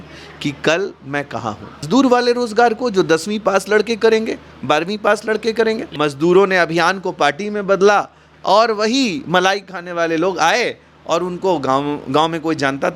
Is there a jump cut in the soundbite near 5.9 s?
yes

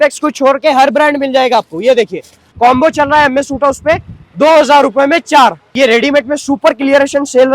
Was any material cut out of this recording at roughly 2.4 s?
yes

